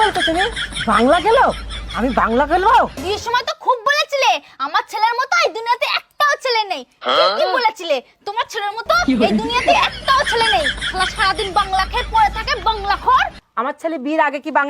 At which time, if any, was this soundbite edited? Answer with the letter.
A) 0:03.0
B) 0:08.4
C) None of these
A